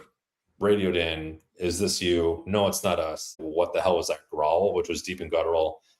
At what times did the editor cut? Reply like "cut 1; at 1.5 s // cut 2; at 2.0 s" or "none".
cut 1; at 3.4 s

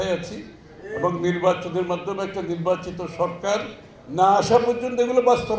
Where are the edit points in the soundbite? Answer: none

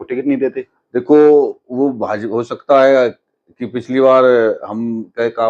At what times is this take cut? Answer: none

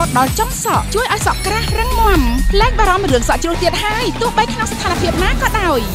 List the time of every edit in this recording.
none

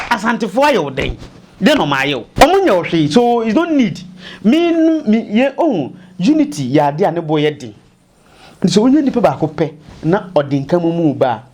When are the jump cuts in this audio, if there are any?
cut 1; at 2.3 s

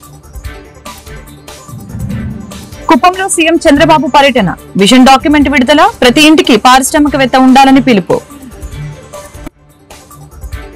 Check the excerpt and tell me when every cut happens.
none

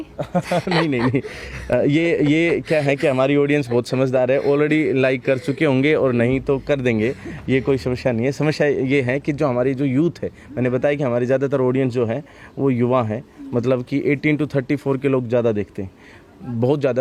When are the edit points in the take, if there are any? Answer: none

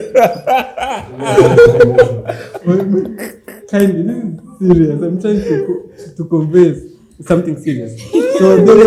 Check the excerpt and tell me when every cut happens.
none

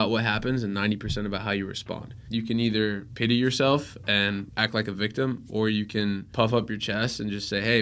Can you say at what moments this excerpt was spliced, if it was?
cut 1; at 2.1 s // cut 2; at 3.1 s // cut 3; at 4.5 s // cut 4; at 6.3 s

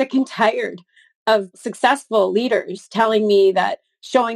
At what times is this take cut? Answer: cut 1; at 1.6 s

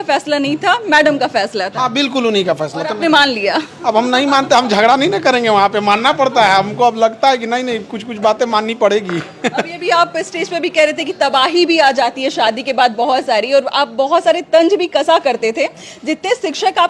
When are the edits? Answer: none

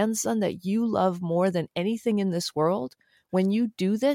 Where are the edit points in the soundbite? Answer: none

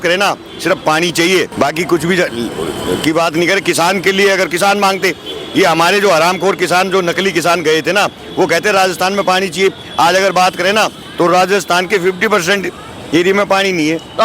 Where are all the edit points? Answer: none

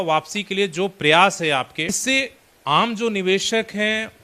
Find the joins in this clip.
cut 1; at 2.0 s

